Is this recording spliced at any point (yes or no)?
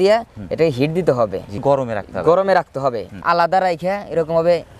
no